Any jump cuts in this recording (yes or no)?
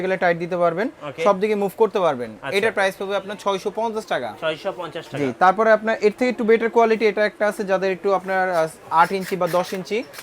no